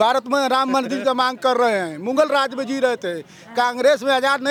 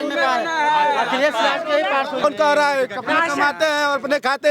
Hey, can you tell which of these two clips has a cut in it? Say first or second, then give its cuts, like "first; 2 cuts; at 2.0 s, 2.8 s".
second; 1 cut; at 2.2 s